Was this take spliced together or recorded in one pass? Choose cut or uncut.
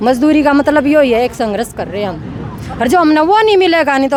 uncut